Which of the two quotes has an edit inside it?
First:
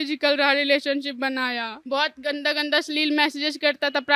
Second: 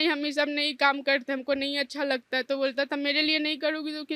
first; 1 cut; at 1.7 s

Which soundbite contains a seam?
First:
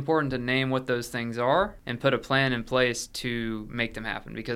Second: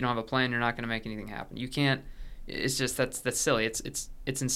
first; 1 cut; at 1.8 s

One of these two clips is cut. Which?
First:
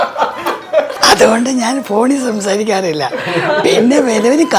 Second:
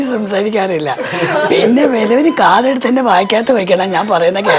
first; 1 cut; at 1.0 s

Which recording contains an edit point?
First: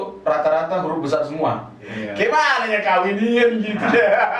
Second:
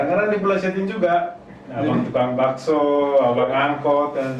first; 1 cut; at 1.8 s

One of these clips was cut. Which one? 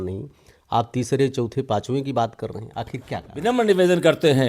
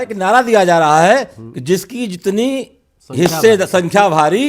first; 1 cut; at 3.3 s

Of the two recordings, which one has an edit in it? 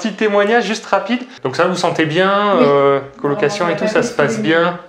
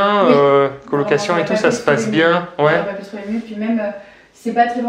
first; 1 cut; at 1.4 s

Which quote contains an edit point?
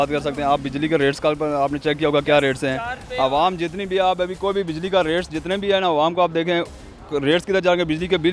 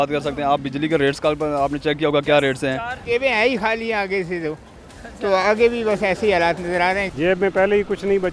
second; 2 cuts; at 3.0 s, 7.1 s

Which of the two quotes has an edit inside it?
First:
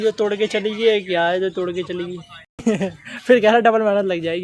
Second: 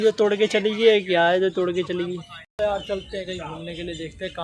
first; 1 cut; at 2.6 s

